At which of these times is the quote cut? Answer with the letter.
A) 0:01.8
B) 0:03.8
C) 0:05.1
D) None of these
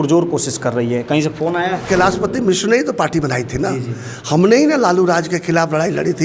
A